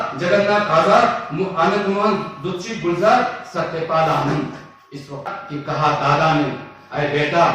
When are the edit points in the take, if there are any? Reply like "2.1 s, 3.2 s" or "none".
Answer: 5.3 s